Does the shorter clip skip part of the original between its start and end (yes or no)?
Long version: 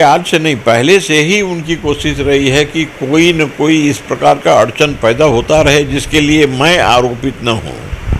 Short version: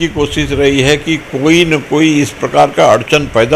no